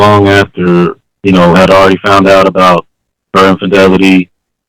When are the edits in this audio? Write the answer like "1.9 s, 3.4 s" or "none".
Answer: 1.1 s

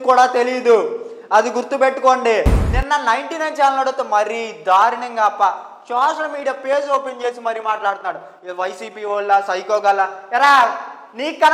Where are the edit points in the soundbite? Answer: 2.6 s

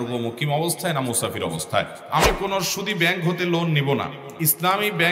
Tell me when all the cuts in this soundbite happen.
2.0 s, 4.2 s

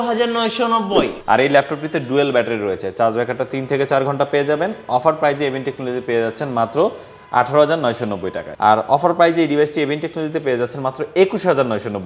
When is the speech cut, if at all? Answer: 1.2 s, 8.4 s

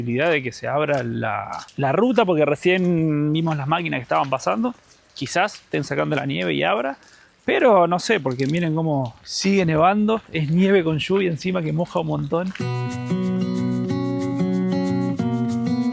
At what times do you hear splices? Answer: none

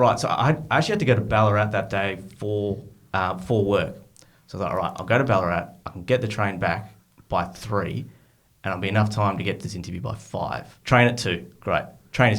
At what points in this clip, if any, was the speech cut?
10.7 s

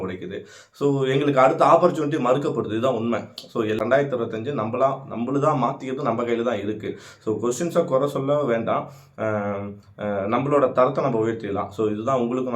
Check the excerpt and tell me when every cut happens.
3.7 s

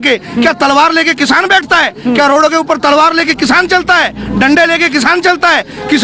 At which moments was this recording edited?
none

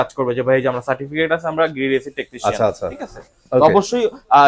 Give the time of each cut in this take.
none

